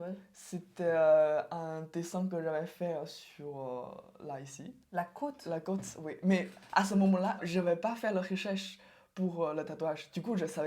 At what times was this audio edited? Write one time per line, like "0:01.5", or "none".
0:07.4